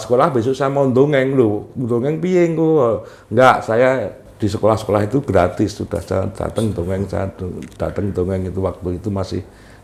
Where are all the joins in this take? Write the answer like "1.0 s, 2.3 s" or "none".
none